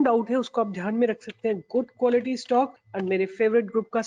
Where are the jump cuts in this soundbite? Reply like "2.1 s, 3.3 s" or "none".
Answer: 2.9 s